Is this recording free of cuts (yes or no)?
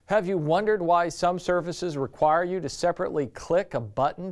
yes